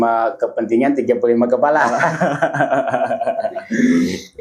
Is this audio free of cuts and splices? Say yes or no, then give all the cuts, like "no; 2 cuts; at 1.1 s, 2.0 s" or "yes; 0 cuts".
yes; 0 cuts